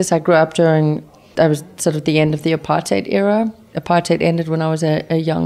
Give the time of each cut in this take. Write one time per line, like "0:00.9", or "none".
0:01.0